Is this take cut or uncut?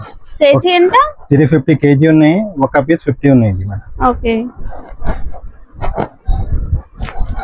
uncut